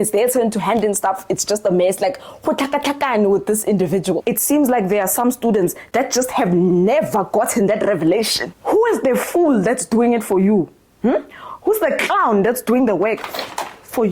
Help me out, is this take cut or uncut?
cut